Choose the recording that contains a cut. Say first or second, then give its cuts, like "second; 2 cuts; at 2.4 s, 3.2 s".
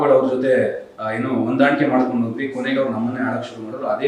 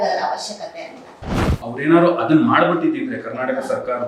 second; 1 cut; at 1.2 s